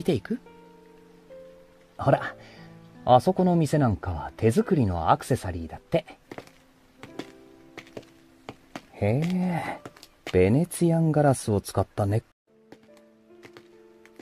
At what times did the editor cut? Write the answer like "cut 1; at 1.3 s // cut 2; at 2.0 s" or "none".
none